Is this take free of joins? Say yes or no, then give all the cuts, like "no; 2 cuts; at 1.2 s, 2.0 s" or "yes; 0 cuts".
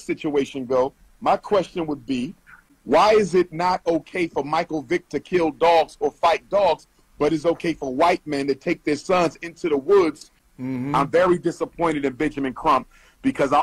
no; 2 cuts; at 2.8 s, 10.4 s